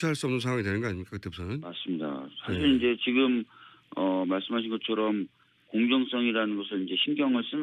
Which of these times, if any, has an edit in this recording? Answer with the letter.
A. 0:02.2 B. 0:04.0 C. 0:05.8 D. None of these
C